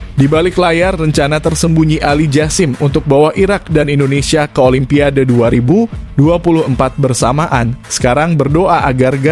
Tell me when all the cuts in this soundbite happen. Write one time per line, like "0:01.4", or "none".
none